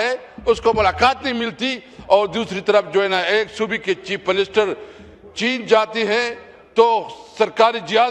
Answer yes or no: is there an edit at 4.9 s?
no